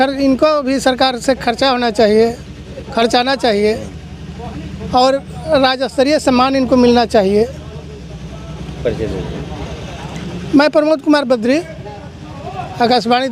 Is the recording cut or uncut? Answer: uncut